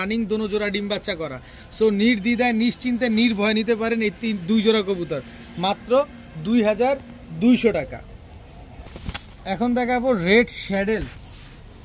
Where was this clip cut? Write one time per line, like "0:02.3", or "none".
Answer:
none